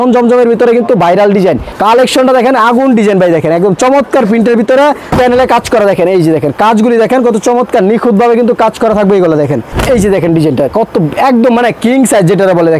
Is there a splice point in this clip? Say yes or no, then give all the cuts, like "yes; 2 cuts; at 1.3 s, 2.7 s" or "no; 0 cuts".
yes; 3 cuts; at 1.7 s, 5.0 s, 9.7 s